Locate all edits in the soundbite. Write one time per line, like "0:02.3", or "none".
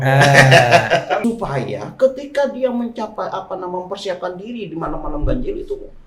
0:01.2